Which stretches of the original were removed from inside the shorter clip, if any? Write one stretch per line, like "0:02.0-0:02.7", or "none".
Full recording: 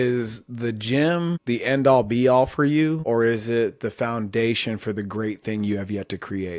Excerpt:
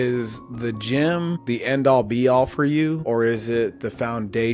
none